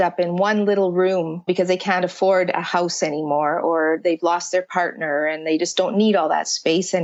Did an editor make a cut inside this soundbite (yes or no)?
no